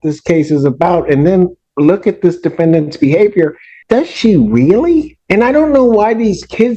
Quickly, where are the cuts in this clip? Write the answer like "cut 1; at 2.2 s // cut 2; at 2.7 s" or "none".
cut 1; at 3.7 s // cut 2; at 5.2 s